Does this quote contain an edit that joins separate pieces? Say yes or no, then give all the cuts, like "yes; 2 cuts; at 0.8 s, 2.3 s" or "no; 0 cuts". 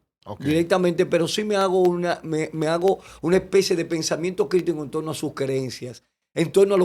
no; 0 cuts